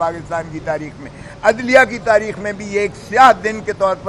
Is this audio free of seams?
yes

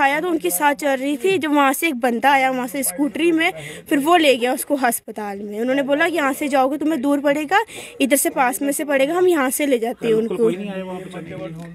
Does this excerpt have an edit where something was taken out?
no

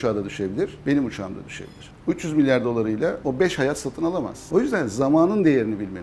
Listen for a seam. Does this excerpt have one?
yes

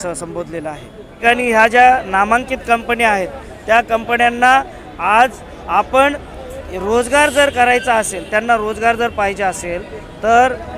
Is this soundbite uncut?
no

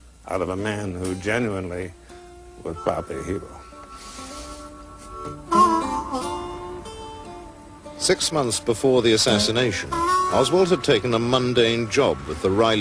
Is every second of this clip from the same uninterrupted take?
no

